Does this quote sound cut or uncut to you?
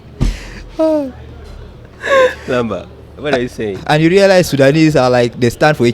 uncut